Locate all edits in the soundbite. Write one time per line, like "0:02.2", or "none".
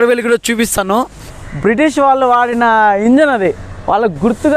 0:01.1